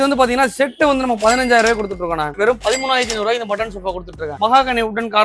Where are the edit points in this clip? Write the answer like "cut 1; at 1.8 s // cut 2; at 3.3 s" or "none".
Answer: cut 1; at 2.3 s // cut 2; at 4.4 s